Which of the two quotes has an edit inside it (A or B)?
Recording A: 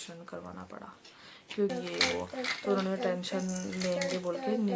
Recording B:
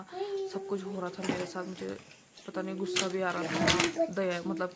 A